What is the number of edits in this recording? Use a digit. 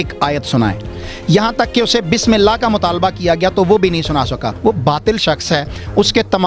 1